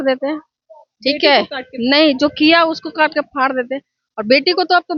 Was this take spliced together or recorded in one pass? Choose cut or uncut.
uncut